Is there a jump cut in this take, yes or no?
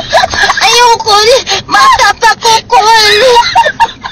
no